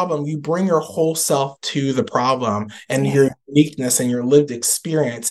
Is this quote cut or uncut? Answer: uncut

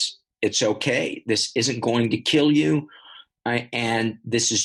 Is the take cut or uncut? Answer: uncut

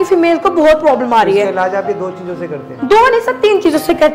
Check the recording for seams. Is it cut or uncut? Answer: uncut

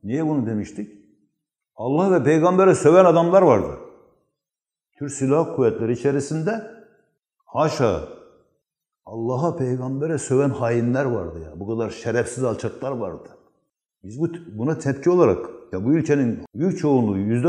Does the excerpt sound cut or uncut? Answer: cut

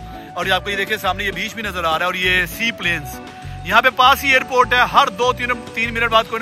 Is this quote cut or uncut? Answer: uncut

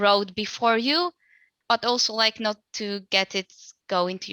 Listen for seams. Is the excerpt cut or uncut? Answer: cut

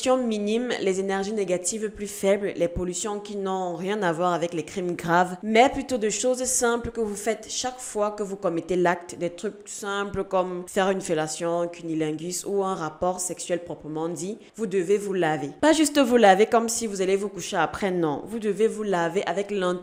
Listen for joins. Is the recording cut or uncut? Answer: uncut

